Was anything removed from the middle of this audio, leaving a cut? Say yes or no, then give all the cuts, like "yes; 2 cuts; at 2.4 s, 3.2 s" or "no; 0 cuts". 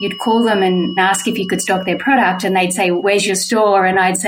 yes; 2 cuts; at 1.0 s, 3.0 s